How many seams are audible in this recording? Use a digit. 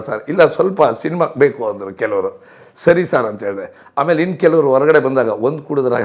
0